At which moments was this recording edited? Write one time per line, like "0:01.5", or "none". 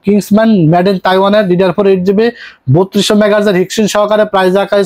none